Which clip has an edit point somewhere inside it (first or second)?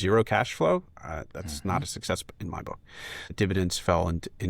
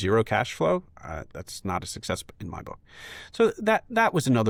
first